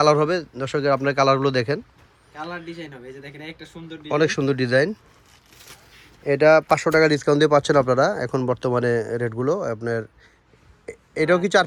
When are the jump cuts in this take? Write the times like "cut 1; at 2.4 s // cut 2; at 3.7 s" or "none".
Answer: none